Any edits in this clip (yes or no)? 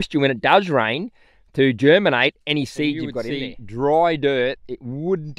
yes